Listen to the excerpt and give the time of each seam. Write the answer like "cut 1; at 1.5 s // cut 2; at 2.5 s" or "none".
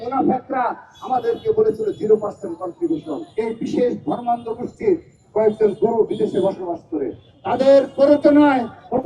cut 1; at 3.3 s